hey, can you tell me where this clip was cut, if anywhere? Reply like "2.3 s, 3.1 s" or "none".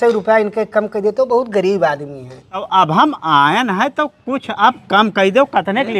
2.6 s